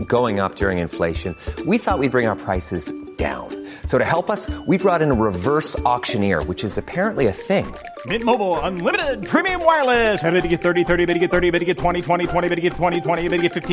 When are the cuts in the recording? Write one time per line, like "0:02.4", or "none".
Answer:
none